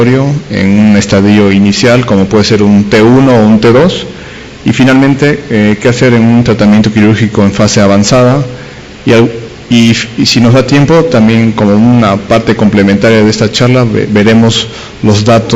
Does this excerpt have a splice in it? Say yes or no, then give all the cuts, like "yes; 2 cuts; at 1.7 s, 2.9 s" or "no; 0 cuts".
yes; 1 cut; at 7.7 s